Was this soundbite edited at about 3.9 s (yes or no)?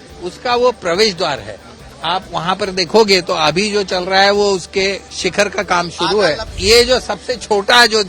no